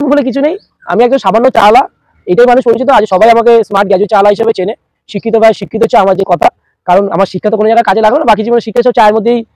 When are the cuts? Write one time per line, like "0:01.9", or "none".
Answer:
none